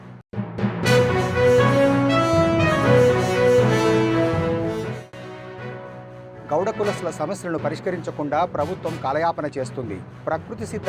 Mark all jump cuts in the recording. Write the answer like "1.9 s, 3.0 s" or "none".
4.9 s